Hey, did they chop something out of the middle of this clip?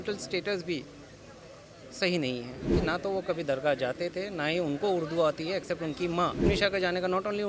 yes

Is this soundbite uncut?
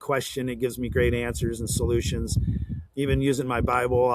no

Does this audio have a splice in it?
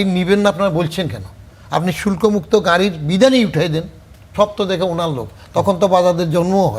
yes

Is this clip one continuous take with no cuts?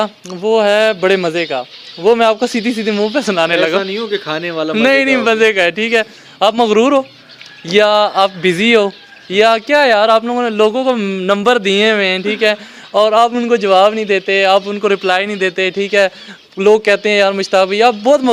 yes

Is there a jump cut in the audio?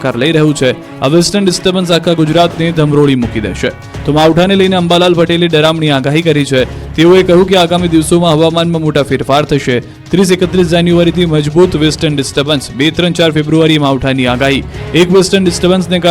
yes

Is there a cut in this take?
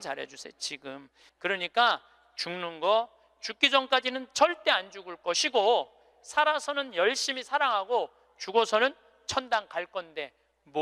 no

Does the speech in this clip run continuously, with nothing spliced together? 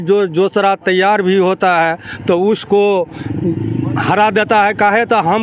yes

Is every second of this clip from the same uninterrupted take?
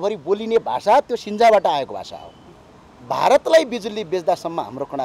no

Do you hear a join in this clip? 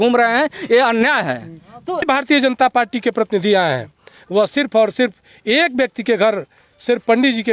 yes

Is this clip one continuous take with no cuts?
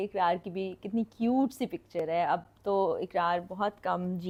yes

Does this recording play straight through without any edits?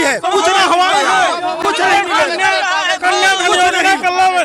yes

